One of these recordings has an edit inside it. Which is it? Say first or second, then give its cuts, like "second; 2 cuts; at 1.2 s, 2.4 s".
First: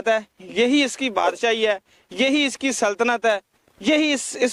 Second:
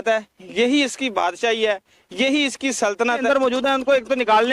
second; 1 cut; at 3.2 s